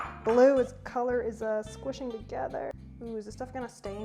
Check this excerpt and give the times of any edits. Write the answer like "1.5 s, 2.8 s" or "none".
2.7 s